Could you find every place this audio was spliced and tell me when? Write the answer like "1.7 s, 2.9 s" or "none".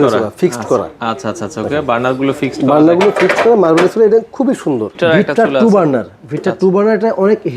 4.9 s